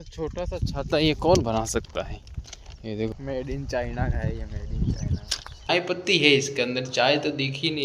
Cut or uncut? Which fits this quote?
cut